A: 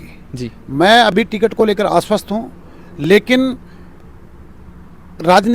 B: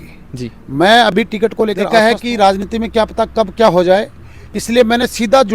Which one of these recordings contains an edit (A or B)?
B